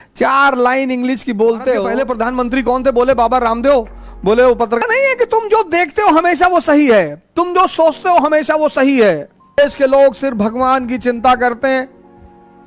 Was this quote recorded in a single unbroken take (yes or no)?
no